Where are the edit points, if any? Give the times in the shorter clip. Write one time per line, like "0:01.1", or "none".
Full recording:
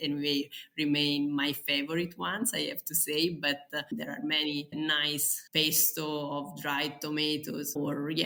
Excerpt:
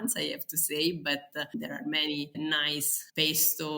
none

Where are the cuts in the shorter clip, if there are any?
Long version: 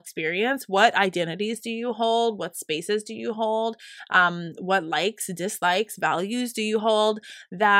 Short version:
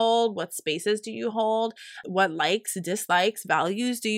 0:01.9

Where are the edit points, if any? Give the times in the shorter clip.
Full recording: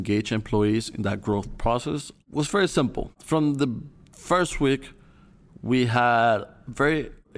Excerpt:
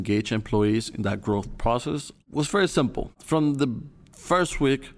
none

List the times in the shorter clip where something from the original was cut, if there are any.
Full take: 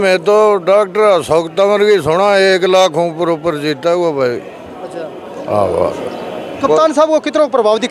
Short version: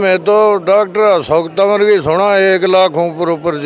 none

